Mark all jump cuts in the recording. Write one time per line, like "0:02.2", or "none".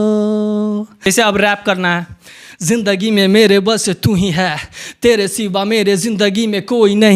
0:00.9

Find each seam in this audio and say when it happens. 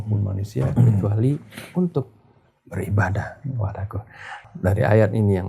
0:04.4

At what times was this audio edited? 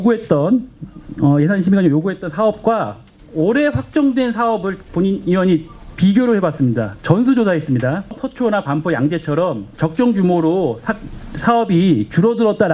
0:08.2

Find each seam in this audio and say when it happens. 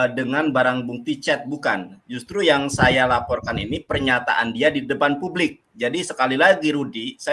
none

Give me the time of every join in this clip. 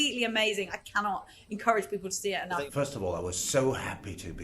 0:02.6

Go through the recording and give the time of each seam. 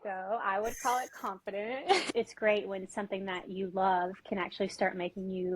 0:02.0

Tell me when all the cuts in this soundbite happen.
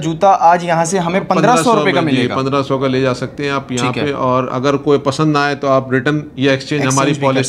none

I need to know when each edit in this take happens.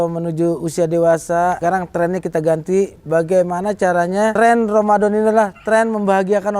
0:01.6
0:04.3

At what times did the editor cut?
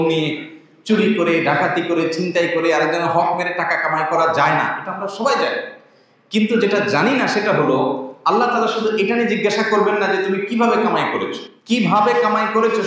0:11.5

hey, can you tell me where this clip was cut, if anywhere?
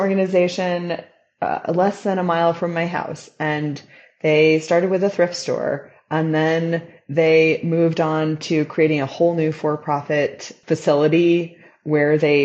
0:10.5

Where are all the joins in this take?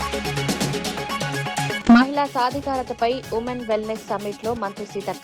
0:01.8

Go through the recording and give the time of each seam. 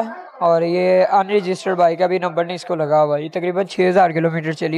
none

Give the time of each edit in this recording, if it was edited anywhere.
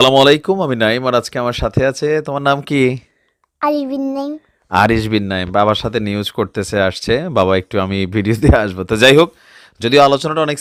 none

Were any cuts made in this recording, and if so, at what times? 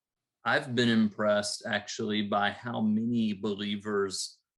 none

